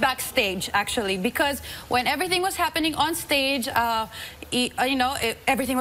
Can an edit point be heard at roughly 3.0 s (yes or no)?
no